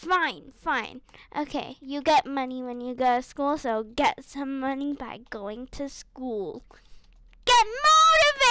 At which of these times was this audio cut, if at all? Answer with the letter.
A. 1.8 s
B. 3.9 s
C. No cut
A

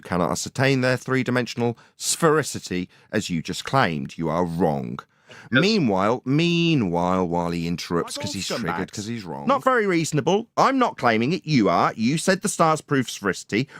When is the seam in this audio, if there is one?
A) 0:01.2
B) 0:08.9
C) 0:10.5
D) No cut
B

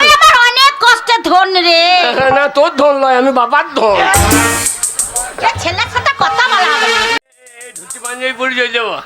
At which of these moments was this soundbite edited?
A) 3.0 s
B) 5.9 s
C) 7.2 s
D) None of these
C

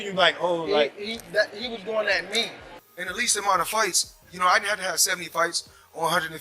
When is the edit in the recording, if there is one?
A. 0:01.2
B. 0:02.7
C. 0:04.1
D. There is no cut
B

